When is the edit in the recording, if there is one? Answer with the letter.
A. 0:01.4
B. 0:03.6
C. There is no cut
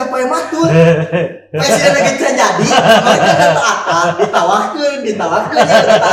C